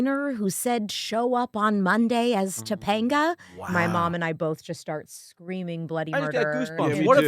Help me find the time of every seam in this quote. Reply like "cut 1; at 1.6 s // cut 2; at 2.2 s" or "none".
cut 1; at 3.6 s